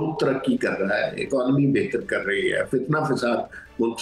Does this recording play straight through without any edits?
yes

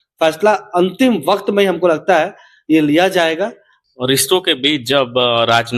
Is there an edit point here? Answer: yes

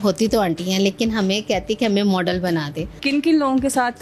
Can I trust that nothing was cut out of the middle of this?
no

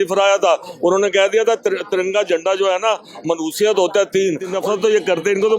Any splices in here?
yes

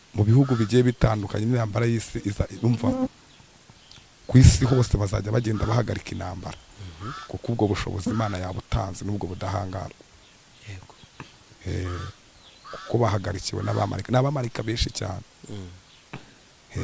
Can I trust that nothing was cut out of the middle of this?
yes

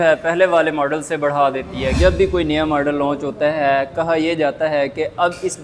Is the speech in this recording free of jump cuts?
no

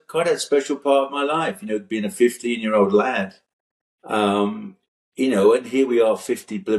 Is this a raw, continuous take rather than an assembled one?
yes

